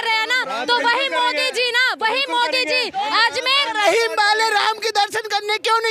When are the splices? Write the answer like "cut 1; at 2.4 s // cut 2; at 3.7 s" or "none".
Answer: none